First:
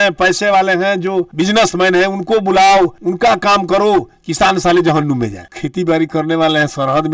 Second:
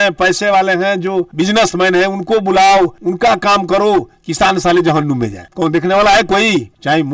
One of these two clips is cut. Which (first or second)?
first